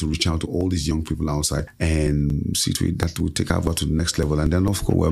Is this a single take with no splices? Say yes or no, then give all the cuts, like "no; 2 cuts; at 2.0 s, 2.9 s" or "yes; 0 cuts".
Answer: no; 1 cut; at 1.7 s